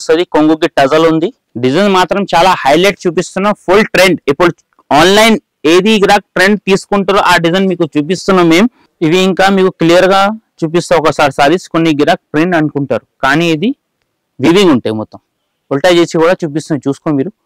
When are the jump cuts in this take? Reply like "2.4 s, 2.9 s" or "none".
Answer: 1.4 s, 8.8 s